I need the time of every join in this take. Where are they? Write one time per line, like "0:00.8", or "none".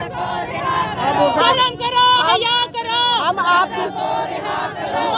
none